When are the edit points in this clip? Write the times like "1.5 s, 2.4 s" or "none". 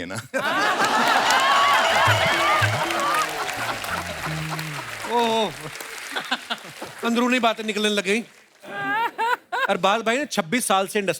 none